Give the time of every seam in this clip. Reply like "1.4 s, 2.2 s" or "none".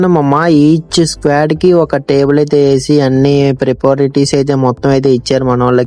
none